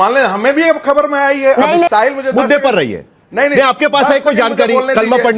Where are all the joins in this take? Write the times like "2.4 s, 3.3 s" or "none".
1.9 s